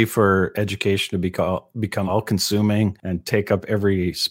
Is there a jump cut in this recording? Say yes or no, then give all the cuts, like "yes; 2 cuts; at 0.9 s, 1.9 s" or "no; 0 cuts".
yes; 1 cut; at 3.1 s